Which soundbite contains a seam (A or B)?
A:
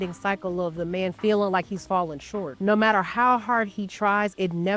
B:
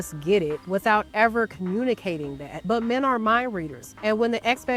A